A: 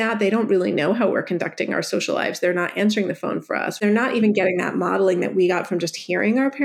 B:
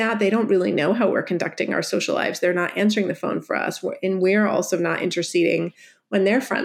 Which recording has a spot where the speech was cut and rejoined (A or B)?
A